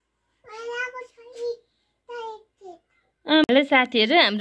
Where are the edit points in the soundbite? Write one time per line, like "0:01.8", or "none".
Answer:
0:03.4